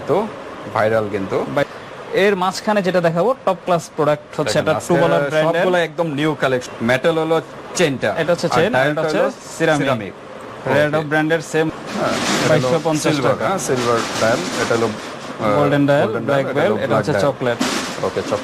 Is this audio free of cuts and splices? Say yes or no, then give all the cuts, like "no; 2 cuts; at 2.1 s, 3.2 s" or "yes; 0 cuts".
no; 3 cuts; at 1.6 s, 6.7 s, 11.7 s